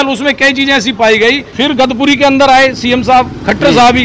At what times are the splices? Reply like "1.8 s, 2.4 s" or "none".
1.5 s